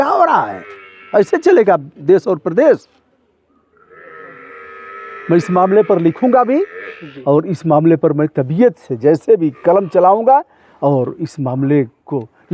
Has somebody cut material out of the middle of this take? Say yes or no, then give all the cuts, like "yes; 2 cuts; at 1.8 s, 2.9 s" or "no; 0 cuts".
no; 0 cuts